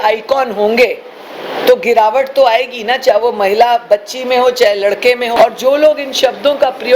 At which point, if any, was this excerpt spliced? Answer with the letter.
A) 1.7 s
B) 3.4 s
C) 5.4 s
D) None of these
C